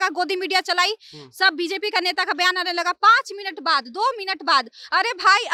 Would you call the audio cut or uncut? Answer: uncut